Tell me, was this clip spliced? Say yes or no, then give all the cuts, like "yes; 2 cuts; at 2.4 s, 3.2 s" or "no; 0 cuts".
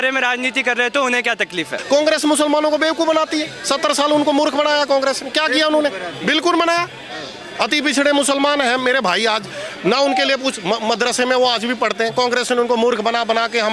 yes; 1 cut; at 1.8 s